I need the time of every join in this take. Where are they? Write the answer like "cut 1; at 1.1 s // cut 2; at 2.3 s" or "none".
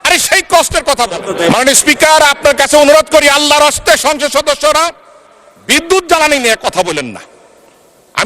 cut 1; at 1.3 s

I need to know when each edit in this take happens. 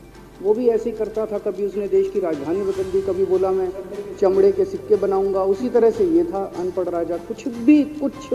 none

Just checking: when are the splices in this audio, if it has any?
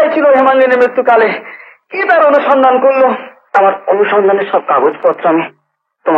cut 1; at 3.3 s

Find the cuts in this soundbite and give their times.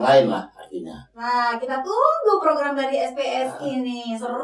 cut 1; at 1.1 s

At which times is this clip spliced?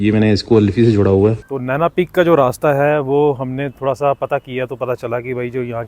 cut 1; at 1.4 s

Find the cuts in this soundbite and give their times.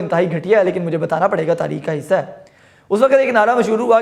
none

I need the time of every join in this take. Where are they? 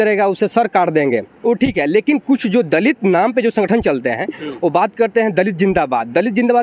cut 1; at 1.3 s

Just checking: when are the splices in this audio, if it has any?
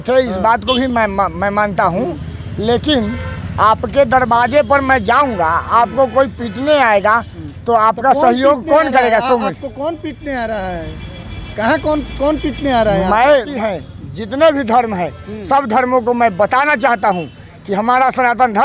cut 1; at 13.5 s

